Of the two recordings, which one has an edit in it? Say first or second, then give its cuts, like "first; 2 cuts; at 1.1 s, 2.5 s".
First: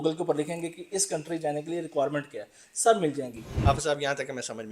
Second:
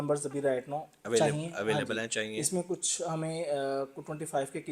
first; 1 cut; at 3.5 s